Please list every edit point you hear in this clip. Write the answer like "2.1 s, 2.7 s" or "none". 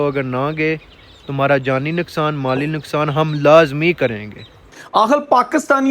4.8 s